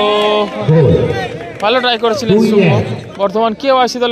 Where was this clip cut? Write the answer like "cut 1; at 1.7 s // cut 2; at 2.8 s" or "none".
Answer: cut 1; at 3.0 s